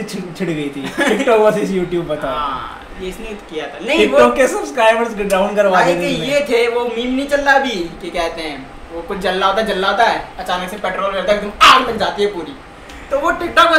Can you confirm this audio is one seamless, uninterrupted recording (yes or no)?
yes